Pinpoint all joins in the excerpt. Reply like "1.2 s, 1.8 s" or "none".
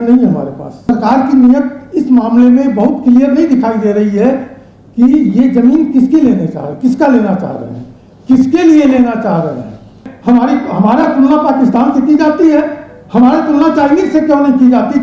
0.9 s, 10.1 s